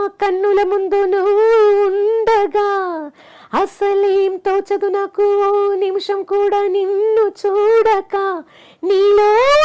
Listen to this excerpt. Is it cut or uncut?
uncut